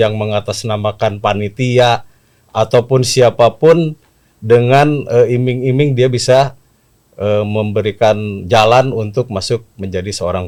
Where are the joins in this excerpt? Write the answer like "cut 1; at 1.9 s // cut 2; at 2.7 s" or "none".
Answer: none